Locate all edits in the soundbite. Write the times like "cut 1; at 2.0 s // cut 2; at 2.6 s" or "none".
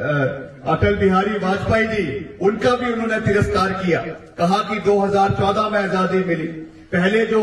none